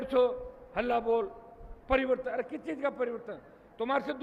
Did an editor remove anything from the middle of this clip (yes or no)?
no